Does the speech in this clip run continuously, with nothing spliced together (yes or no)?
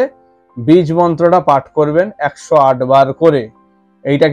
yes